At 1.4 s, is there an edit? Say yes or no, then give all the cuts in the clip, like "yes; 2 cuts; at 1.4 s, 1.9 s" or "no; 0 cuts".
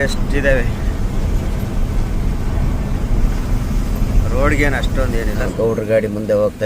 no; 1 cut; at 5.5 s